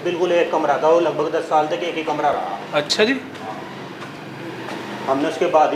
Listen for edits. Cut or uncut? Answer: uncut